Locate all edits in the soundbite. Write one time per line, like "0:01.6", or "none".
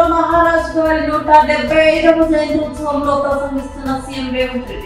none